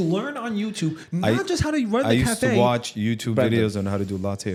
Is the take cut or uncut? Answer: uncut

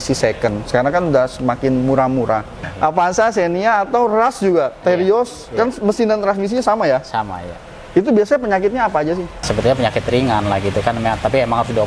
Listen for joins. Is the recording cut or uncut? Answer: cut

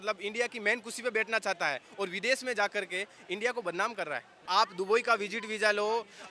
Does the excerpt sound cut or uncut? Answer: cut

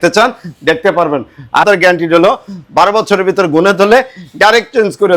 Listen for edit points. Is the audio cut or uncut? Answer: cut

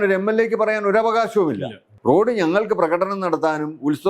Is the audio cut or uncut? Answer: cut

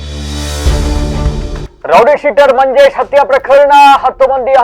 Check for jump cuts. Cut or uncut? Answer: cut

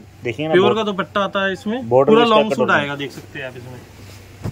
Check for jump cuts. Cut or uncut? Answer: uncut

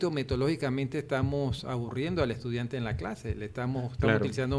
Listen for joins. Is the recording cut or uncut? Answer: uncut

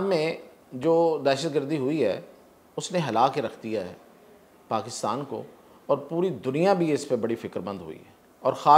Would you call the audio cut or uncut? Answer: uncut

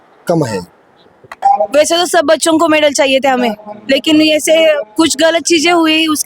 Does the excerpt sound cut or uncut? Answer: cut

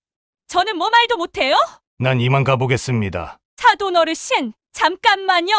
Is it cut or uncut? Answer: cut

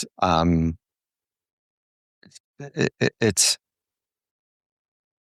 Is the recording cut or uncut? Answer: uncut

